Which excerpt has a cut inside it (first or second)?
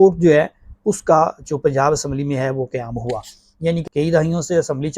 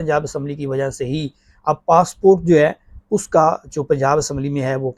first